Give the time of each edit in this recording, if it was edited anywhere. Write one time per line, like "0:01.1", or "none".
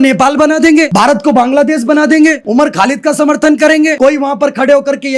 0:00.9
0:02.4
0:03.9